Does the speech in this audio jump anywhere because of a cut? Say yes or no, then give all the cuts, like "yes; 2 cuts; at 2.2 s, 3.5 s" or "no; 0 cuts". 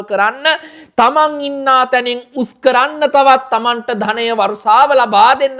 no; 0 cuts